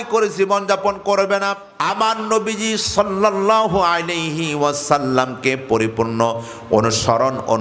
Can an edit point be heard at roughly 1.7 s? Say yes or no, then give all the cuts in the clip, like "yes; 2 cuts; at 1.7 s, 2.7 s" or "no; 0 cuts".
yes; 1 cut; at 1.7 s